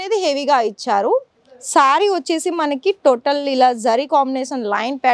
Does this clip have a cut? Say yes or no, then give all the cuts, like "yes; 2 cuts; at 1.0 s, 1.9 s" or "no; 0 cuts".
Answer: no; 0 cuts